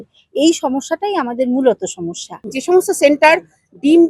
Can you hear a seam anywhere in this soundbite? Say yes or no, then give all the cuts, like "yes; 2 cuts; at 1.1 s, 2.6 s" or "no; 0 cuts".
yes; 1 cut; at 2.5 s